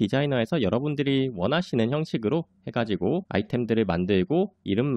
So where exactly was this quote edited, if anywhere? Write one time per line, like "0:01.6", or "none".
0:03.3